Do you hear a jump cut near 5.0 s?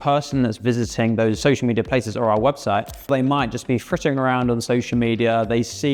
no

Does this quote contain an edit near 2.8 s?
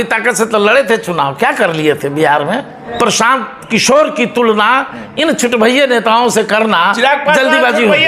yes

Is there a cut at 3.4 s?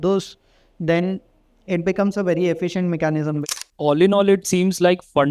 yes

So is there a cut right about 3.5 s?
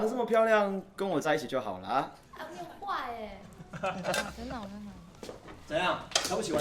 yes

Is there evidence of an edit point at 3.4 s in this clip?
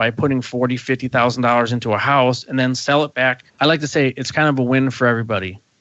yes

